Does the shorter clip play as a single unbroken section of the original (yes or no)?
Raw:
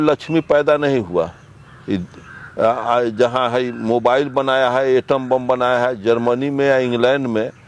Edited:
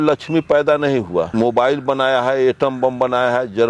no